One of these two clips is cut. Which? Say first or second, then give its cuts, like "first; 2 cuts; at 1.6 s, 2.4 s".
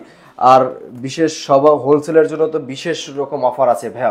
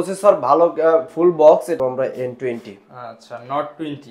second; 1 cut; at 1.8 s